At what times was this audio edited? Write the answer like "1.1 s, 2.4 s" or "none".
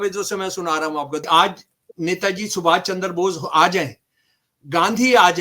1.2 s